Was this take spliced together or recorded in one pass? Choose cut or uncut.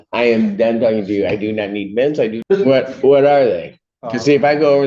cut